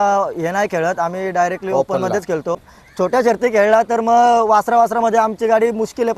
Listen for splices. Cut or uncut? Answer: cut